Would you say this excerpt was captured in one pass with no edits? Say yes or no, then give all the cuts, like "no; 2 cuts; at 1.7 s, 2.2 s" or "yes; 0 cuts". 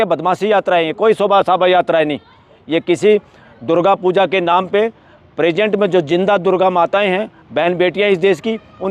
yes; 0 cuts